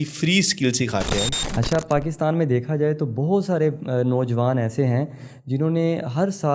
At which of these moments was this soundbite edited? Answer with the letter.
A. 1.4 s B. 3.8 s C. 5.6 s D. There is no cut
A